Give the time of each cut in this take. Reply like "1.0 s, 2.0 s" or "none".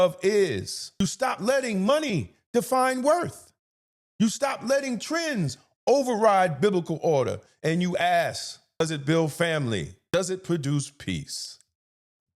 1.0 s, 8.8 s, 10.0 s